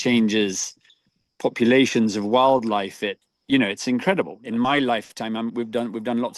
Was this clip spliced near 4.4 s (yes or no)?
yes